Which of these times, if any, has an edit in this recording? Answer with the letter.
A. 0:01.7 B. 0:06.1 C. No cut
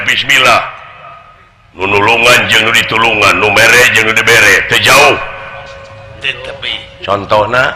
A